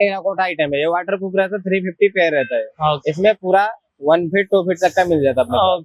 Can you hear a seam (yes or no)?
no